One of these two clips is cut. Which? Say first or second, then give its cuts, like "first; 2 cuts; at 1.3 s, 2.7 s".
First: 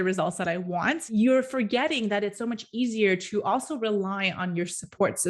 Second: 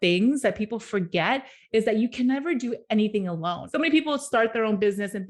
second; 1 cut; at 3.6 s